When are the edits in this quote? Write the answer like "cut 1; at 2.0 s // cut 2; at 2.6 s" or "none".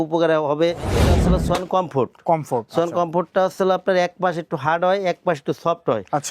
cut 1; at 1.1 s